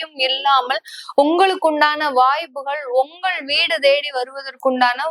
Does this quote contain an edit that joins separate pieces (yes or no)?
no